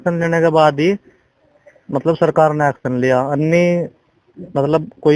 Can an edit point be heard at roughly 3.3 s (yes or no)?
no